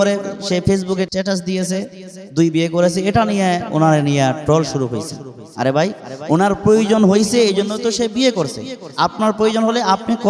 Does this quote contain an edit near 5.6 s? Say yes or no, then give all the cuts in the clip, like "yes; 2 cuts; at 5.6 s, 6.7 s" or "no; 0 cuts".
no; 1 cut; at 1.1 s